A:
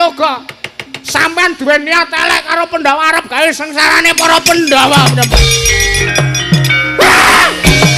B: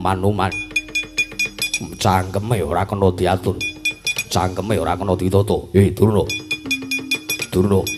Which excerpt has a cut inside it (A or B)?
A